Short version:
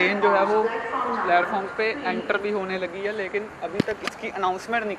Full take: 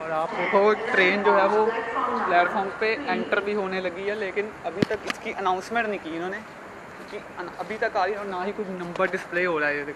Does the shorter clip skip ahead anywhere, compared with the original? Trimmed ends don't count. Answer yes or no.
no